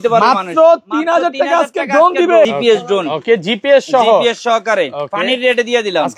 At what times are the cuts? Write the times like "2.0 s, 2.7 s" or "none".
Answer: 2.5 s